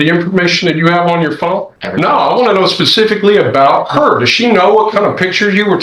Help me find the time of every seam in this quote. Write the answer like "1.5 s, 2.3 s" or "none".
1.8 s